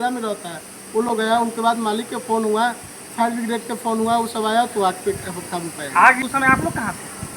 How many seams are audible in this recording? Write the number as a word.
one